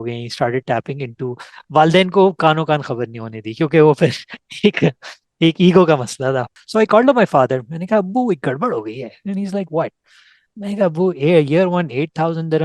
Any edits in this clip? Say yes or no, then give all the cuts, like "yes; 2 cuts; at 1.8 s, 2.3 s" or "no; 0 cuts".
yes; 1 cut; at 6.5 s